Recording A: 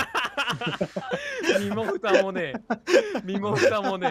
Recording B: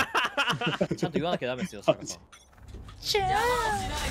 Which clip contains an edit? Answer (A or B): B